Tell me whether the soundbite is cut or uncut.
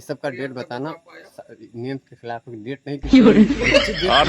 uncut